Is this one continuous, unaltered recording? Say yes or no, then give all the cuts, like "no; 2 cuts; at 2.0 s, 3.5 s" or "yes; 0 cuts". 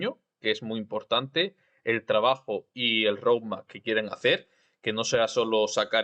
yes; 0 cuts